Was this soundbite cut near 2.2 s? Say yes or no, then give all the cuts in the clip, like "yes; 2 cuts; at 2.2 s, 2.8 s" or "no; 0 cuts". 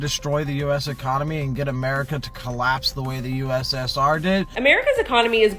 no; 1 cut; at 4.5 s